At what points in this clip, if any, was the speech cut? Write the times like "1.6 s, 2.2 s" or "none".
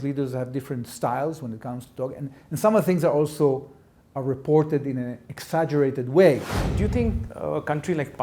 6.5 s

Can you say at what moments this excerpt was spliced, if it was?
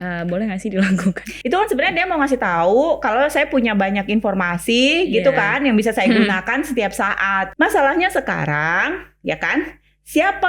1.3 s, 7.5 s

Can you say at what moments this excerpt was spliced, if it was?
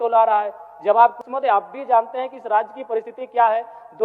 1.2 s

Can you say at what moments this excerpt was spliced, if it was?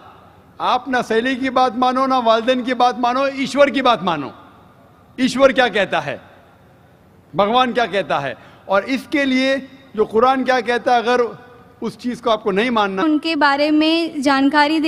none

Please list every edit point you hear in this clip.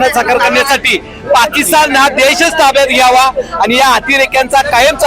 none

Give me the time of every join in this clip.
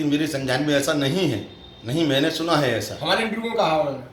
none

